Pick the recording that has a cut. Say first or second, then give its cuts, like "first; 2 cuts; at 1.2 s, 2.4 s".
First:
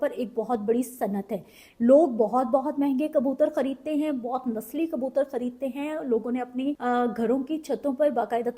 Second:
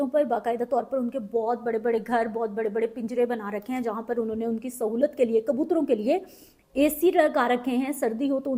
first; 1 cut; at 6.8 s